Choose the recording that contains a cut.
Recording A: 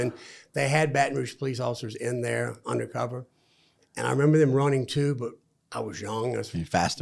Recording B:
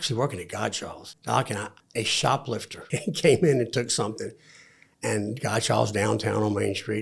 B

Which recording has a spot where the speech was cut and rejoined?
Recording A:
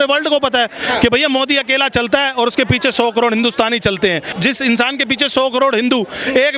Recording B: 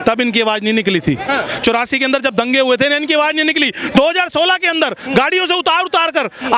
A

